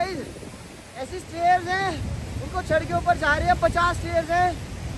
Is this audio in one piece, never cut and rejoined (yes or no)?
yes